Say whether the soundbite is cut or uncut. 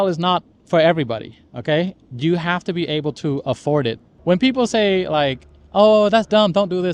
cut